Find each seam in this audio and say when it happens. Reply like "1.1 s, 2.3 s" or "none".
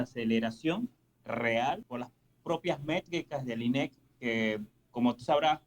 1.8 s